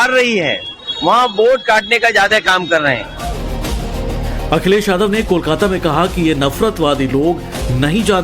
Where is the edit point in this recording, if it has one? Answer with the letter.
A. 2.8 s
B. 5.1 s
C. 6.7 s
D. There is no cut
C